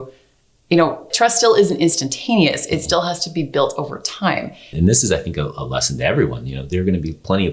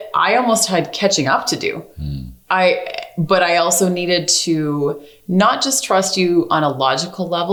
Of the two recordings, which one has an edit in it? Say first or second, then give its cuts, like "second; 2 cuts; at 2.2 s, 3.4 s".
first; 2 cuts; at 1.1 s, 4.7 s